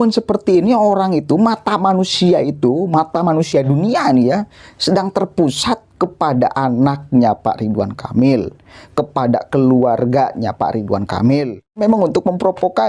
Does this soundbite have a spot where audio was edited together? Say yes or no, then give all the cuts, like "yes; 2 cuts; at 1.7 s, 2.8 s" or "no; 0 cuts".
yes; 1 cut; at 11.8 s